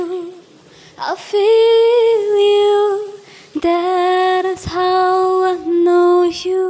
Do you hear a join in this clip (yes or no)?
no